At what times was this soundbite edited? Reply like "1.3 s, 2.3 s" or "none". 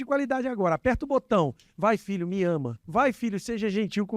2.8 s

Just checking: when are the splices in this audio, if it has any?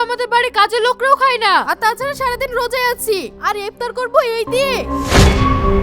4.8 s

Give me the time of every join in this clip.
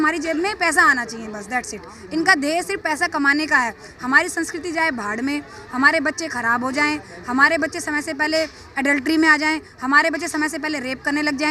none

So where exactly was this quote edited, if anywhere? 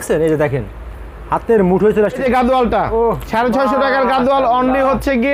2.2 s

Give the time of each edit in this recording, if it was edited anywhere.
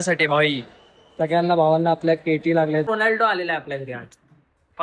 2.9 s

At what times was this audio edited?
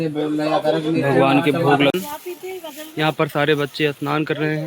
1.9 s

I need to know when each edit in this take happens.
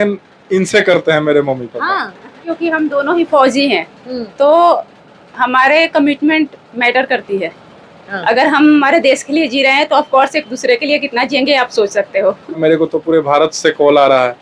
2.5 s, 12.6 s

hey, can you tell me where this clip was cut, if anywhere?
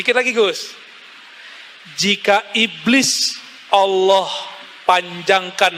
none

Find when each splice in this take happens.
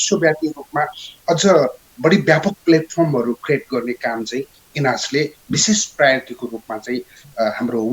none

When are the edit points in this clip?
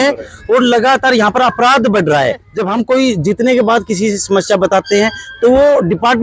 2.5 s

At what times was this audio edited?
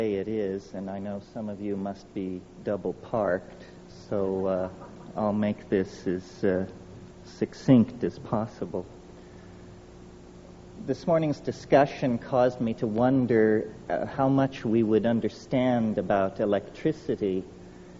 11.5 s

